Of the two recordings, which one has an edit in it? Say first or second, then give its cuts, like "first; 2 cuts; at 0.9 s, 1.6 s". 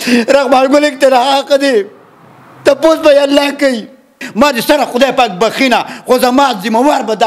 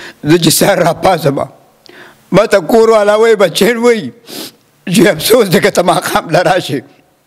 first; 1 cut; at 4.2 s